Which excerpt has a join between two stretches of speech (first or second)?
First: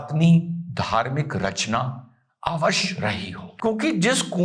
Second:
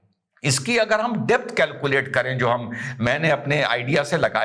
first